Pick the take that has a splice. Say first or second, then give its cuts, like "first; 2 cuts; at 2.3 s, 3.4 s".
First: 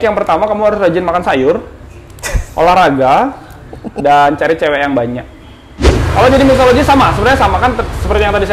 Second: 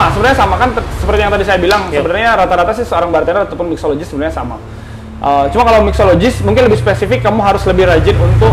first; 1 cut; at 5.9 s